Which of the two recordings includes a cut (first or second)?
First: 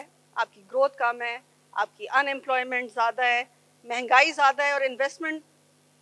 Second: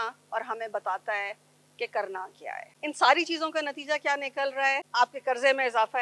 second